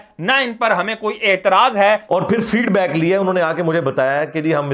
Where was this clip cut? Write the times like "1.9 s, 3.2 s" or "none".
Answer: 2.0 s